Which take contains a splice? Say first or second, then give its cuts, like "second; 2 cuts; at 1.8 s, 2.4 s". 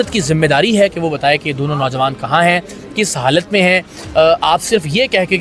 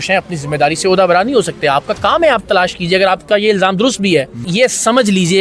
second; 1 cut; at 4.4 s